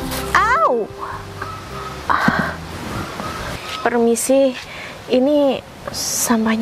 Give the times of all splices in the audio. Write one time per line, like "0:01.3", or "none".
0:03.4